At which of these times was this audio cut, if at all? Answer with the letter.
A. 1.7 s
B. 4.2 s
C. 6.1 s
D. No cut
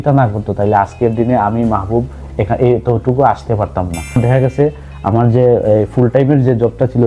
B